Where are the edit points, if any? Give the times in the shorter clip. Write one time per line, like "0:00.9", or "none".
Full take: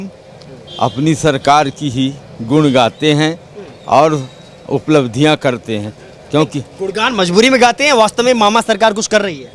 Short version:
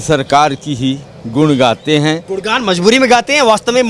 0:02.3